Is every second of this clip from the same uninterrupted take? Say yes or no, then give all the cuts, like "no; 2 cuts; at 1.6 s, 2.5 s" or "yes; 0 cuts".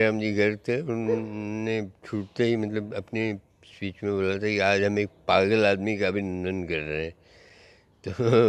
yes; 0 cuts